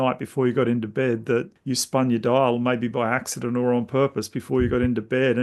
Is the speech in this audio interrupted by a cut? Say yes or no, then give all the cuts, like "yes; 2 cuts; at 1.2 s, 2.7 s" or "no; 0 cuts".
yes; 1 cut; at 1.6 s